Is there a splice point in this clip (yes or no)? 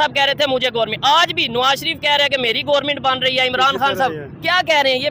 no